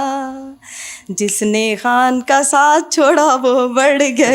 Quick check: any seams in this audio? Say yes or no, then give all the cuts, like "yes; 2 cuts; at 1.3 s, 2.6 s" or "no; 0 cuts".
no; 0 cuts